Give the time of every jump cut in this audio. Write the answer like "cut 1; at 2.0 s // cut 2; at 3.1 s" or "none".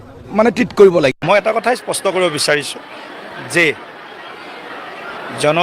cut 1; at 1.2 s

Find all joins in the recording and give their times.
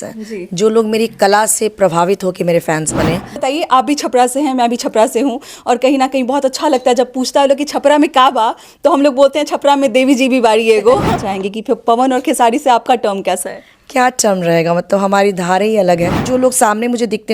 cut 1; at 3.3 s // cut 2; at 11.3 s // cut 3; at 16.2 s

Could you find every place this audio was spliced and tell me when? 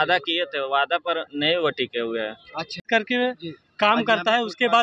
cut 1; at 2.9 s

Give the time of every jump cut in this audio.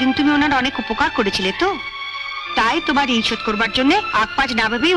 none

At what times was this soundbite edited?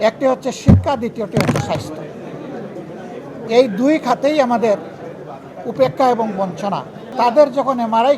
cut 1; at 7.1 s

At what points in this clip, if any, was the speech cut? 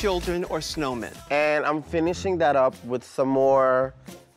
cut 1; at 1.1 s

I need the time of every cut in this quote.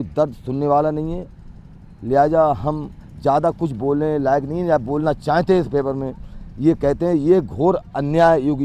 none

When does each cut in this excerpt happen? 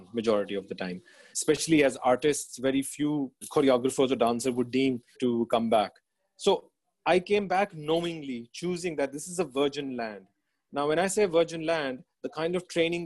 cut 1; at 1.3 s // cut 2; at 3.4 s // cut 3; at 5.2 s

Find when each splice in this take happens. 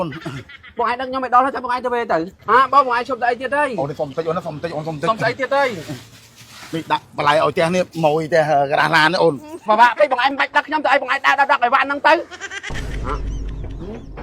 cut 1; at 2.3 s // cut 2; at 9.6 s // cut 3; at 12.4 s

